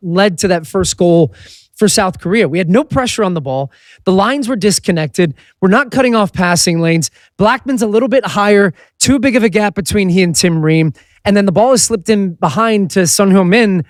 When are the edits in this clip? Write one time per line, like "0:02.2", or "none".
none